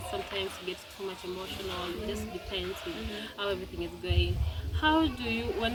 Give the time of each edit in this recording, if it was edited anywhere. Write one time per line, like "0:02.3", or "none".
none